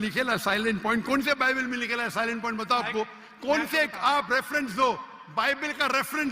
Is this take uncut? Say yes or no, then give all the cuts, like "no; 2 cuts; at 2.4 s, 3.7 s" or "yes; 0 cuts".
yes; 0 cuts